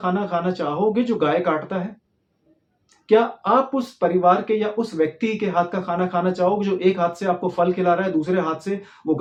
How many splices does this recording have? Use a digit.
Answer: 0